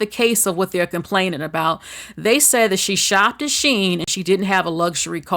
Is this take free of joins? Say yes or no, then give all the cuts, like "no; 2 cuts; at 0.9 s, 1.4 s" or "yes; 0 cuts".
yes; 0 cuts